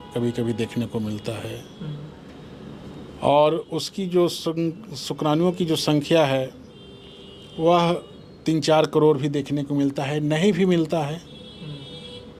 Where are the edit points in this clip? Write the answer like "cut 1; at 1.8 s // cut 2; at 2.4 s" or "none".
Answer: none